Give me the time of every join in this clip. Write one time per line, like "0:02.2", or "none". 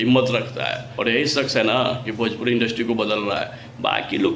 0:01.1